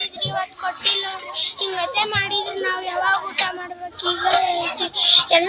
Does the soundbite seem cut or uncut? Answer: uncut